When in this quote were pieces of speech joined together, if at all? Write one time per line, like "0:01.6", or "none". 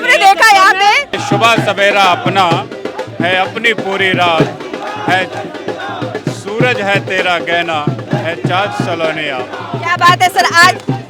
0:01.2

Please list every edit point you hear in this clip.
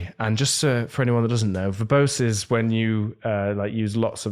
none

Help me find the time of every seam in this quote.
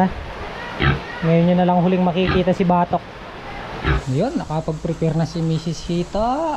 0:04.0

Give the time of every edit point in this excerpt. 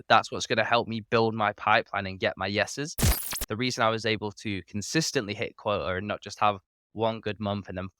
0:03.2

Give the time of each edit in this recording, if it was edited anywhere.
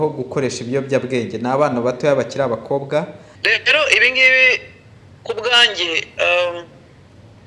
0:03.3

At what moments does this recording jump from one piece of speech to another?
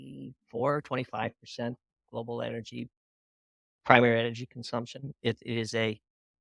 none

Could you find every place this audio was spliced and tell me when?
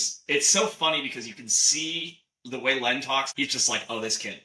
0:03.3

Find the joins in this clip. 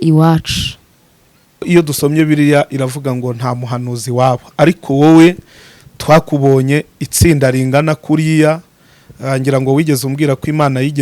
0:01.6

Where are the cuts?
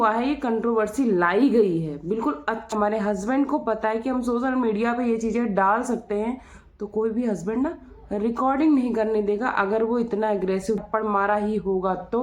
0:02.7
0:10.8

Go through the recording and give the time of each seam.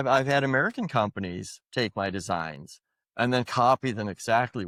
none

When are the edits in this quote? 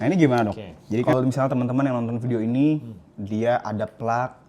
0:01.0

